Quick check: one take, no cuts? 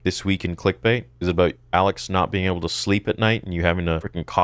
yes; 0 cuts

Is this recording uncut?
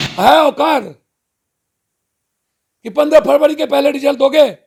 yes; 0 cuts

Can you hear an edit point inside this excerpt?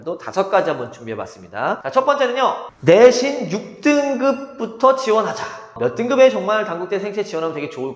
yes; 2 cuts; at 1.8 s, 2.7 s

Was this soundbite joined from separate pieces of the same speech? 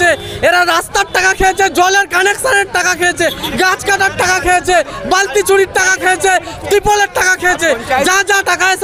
no; 0 cuts

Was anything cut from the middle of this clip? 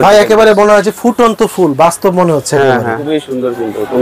yes; 1 cut; at 3.0 s

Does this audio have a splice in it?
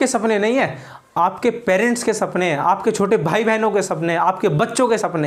no; 0 cuts

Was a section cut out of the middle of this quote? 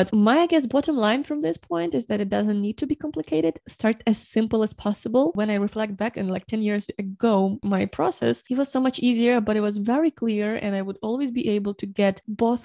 yes; 3 cuts; at 5.4 s, 7.6 s, 8.4 s

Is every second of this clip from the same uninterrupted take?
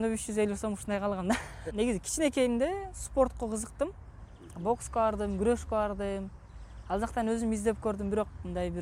no; 1 cut; at 1.6 s

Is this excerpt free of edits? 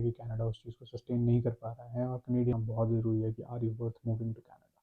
no; 1 cut; at 2.5 s

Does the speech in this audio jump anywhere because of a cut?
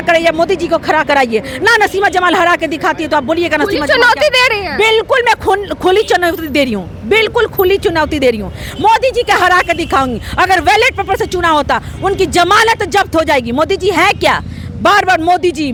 no; 0 cuts

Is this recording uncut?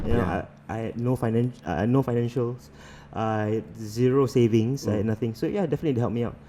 yes; 0 cuts

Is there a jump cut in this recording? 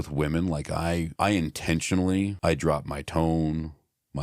yes; 2 cuts; at 1.1 s, 2.3 s

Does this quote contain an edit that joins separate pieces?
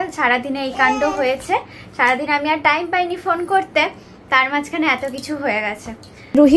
no; 0 cuts

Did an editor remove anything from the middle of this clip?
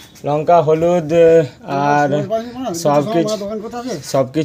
no; 0 cuts

